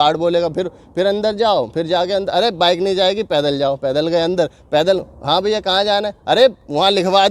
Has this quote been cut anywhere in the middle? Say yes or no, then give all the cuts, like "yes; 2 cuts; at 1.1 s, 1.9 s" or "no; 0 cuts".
no; 0 cuts